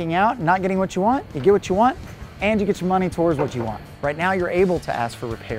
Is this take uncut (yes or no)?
no